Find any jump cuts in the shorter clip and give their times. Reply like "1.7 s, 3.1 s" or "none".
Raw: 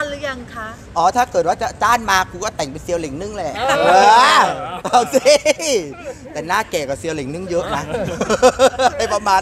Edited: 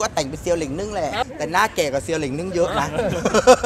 1.2 s